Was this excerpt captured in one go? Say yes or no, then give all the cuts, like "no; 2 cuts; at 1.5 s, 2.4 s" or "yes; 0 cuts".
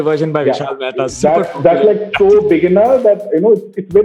yes; 0 cuts